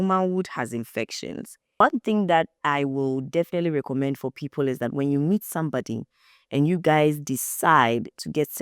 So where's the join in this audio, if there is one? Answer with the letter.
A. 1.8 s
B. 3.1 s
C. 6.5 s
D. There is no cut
A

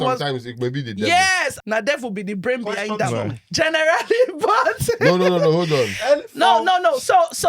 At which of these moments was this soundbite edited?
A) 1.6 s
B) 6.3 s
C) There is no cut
A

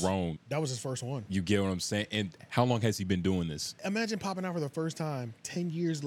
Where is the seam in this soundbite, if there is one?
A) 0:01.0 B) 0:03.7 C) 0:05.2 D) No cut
B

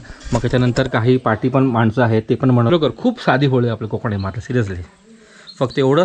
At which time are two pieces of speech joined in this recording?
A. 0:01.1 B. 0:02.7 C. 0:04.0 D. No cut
B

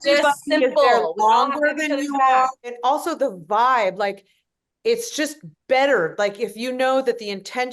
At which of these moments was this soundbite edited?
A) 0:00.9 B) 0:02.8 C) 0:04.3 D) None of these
B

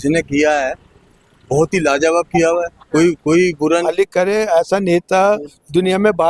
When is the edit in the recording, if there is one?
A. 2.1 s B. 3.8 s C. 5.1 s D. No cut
B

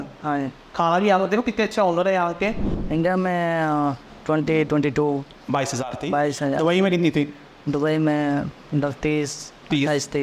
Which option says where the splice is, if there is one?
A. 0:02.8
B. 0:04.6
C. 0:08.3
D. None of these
A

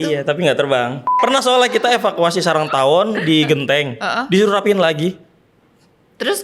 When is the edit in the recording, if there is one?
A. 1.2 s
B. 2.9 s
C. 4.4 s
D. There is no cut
A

